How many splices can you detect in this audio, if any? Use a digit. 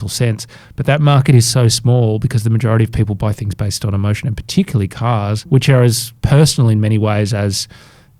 2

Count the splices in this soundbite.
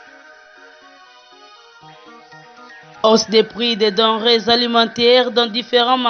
0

